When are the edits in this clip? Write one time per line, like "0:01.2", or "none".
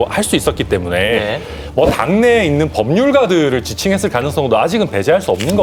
none